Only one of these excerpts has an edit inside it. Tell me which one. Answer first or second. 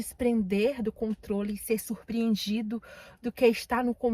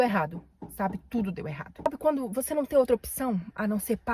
second